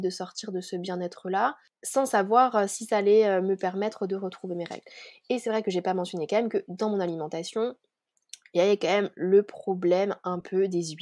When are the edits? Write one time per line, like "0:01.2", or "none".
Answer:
none